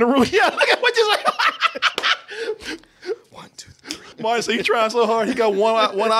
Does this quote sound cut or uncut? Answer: cut